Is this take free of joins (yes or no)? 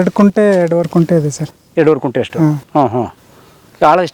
yes